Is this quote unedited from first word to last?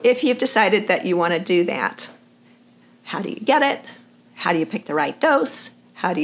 yes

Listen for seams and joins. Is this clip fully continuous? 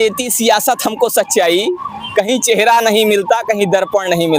yes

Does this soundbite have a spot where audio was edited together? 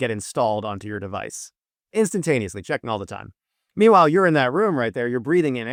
no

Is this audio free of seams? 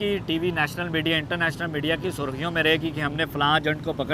yes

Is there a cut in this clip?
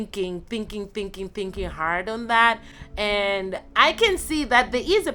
no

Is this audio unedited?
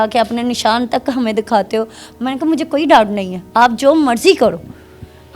yes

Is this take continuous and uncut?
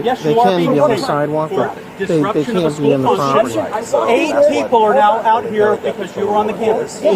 yes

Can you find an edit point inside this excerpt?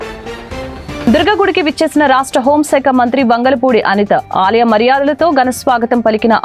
yes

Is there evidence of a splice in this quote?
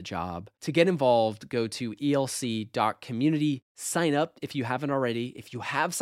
no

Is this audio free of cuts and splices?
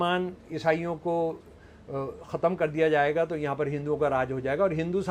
yes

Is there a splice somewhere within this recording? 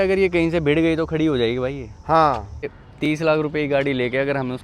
yes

